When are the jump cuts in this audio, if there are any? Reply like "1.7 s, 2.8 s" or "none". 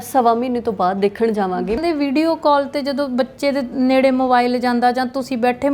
1.8 s